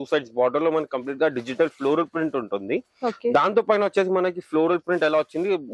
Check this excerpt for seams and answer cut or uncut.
uncut